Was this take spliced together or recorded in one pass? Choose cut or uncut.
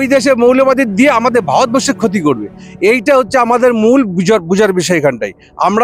uncut